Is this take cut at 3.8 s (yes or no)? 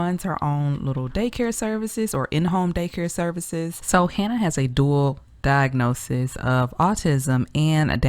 yes